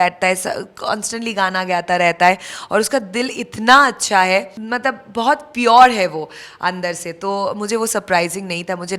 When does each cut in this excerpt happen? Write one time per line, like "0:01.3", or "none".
none